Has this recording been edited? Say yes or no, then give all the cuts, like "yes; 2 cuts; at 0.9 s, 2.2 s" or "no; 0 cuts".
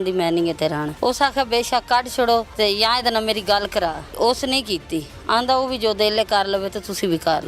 yes; 3 cuts; at 0.9 s, 2.5 s, 4.1 s